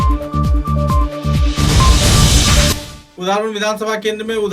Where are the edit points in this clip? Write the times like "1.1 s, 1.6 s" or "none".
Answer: 2.7 s